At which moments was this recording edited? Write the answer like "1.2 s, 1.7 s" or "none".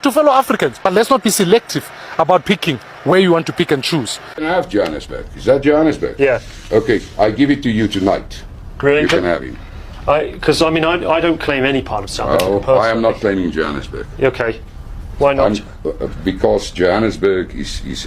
4.3 s